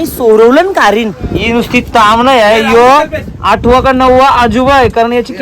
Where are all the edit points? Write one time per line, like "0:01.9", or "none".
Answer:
0:01.2